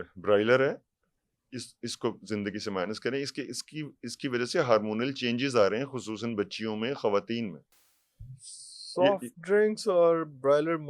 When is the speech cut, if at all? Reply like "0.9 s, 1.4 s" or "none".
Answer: none